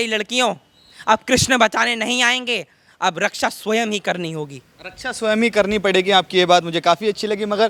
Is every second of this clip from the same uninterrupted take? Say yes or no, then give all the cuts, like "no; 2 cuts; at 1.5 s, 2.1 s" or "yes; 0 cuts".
yes; 0 cuts